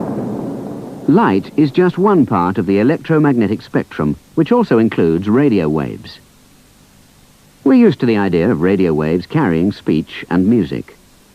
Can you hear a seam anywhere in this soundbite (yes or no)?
yes